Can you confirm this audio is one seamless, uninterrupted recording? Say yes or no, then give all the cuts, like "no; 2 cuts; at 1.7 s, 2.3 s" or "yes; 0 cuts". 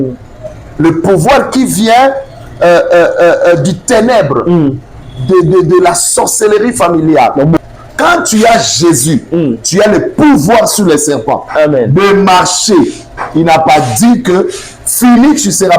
no; 1 cut; at 7.6 s